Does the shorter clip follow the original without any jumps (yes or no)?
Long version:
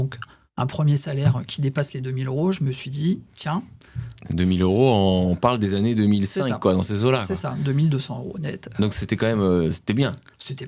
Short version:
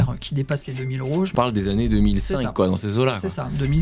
no